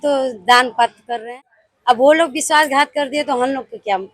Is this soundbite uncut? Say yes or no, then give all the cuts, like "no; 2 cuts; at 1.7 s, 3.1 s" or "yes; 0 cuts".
no; 1 cut; at 1.2 s